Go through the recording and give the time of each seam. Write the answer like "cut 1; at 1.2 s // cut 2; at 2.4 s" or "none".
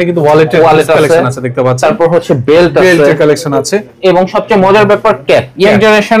none